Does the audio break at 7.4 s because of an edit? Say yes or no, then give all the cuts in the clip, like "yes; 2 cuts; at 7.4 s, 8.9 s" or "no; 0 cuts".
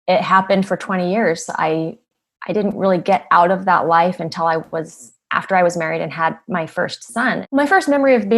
yes; 1 cut; at 7.4 s